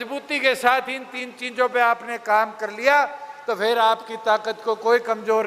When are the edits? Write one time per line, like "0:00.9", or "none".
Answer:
none